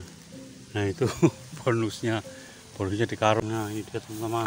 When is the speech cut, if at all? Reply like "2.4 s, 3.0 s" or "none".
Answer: 3.4 s

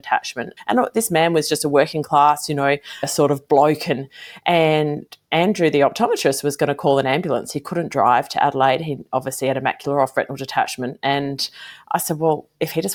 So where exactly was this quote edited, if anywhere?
none

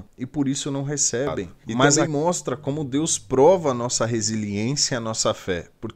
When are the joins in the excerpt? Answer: 1.9 s

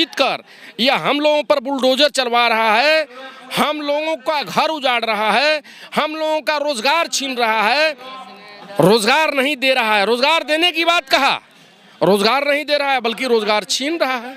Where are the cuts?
none

